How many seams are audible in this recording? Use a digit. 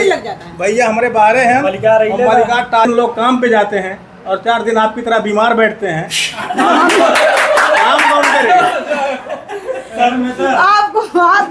1